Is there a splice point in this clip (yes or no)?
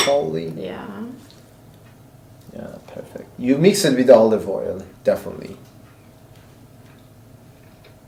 no